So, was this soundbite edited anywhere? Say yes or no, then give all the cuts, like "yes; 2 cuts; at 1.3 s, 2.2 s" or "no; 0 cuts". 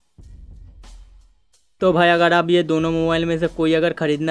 yes; 1 cut; at 1.8 s